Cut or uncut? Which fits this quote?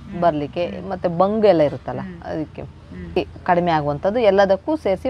cut